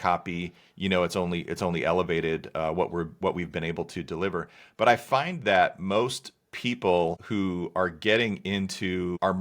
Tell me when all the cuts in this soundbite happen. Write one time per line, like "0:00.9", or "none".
none